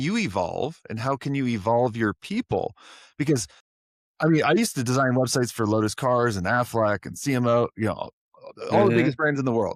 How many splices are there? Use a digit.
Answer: 0